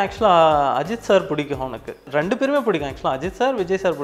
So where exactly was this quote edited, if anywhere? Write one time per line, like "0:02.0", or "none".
0:02.0